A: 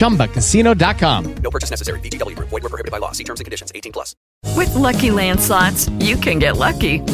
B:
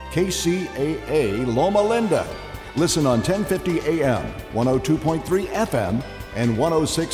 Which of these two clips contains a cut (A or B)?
A